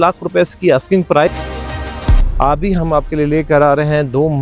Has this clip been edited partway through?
yes; 1 cut; at 1.3 s

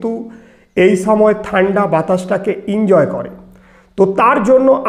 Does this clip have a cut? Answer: no; 0 cuts

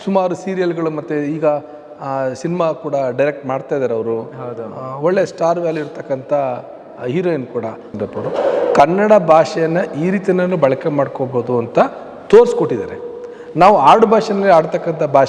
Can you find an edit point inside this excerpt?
yes; 1 cut; at 7.9 s

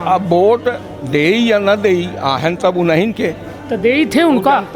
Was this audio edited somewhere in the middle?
no; 0 cuts

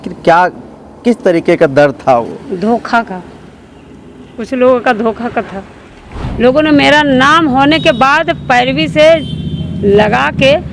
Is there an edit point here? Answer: yes; 1 cut; at 6.2 s

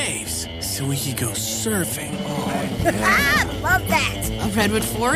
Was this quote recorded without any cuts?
yes; 0 cuts

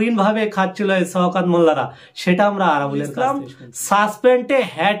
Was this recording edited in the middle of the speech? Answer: yes; 1 cut; at 3.2 s

